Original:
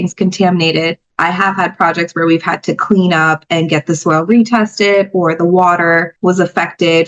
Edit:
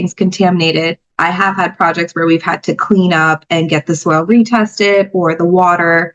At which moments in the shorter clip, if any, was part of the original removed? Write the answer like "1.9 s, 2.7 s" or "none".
none